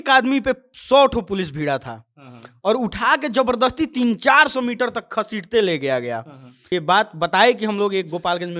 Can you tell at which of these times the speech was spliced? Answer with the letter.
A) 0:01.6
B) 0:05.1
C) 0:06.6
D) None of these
C